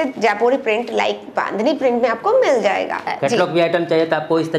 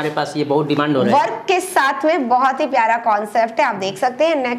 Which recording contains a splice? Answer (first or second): first